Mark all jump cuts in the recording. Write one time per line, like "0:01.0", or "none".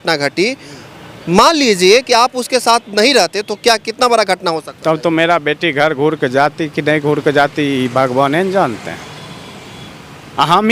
none